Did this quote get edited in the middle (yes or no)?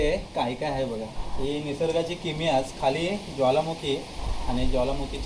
no